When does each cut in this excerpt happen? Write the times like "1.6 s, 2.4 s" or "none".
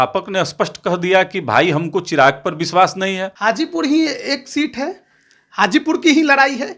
3.3 s